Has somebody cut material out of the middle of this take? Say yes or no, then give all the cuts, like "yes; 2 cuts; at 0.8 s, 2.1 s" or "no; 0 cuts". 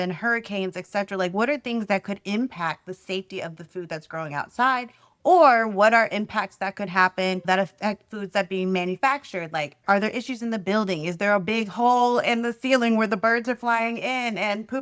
yes; 1 cut; at 7.4 s